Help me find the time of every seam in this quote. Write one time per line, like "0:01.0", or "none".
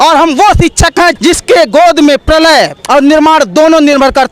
0:01.1
0:02.8

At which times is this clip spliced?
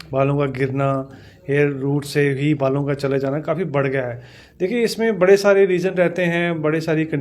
none

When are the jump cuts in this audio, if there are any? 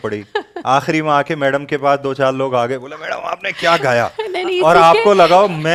none

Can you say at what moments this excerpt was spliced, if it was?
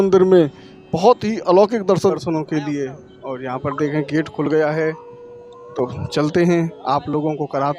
0:02.1

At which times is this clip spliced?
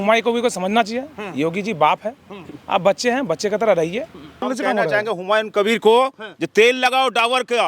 0:04.5

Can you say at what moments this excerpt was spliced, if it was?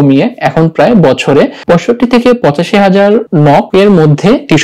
0:01.6
0:03.6

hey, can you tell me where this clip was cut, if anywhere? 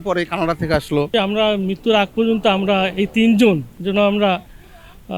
0:01.1
0:03.7

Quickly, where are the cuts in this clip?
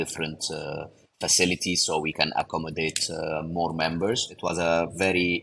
0:02.1
0:04.3

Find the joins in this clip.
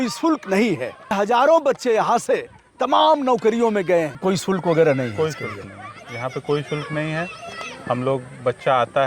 0:01.1
0:04.2

